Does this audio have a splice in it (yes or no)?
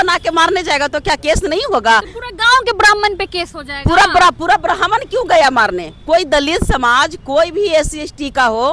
no